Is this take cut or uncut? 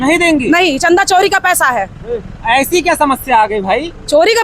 uncut